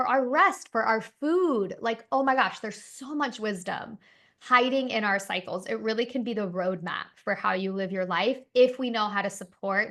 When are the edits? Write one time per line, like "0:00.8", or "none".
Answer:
none